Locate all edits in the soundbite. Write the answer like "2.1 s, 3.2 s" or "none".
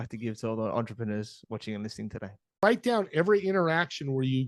2.6 s